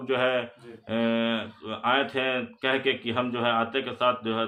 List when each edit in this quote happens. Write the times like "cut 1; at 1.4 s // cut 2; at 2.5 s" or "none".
none